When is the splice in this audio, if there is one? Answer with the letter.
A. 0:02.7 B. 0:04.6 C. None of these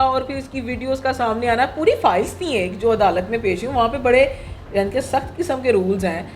C